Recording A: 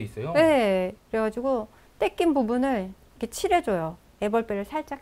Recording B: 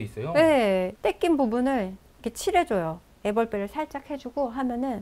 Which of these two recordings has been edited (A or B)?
B